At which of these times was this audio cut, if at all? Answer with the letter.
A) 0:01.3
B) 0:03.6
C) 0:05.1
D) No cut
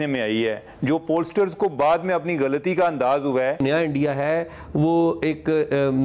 B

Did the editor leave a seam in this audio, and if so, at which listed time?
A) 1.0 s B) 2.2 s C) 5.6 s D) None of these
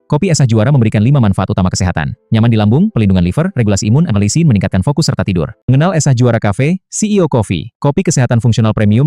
C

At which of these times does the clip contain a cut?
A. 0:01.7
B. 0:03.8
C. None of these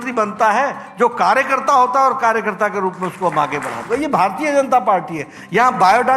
B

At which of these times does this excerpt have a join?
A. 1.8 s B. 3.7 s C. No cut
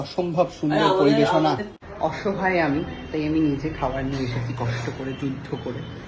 A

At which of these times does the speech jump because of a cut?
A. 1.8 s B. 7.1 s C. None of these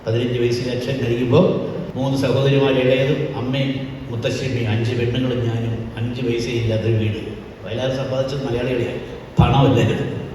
A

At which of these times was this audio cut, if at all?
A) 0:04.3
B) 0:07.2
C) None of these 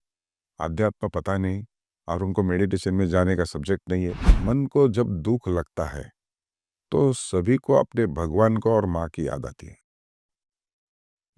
A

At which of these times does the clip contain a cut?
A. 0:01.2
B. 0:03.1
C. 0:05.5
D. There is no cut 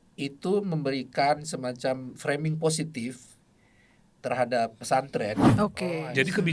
C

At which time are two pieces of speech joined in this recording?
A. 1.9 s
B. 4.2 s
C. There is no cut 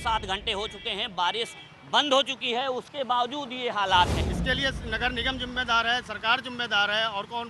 B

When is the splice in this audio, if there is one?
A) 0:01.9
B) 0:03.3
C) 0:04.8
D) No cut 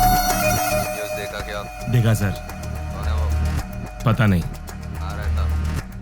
D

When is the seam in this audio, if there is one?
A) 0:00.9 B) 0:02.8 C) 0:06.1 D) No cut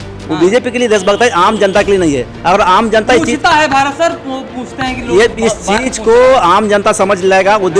D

